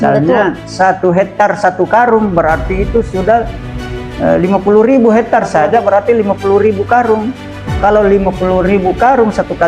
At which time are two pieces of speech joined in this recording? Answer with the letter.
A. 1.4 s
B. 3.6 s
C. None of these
C